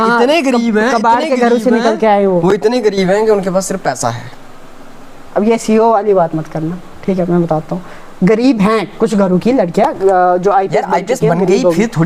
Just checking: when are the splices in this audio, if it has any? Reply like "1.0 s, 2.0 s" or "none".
none